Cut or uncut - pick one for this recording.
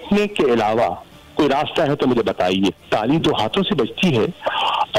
uncut